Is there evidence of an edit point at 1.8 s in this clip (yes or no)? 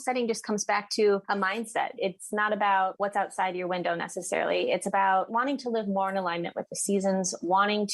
yes